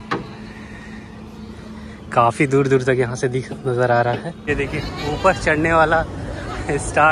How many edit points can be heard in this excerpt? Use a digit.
1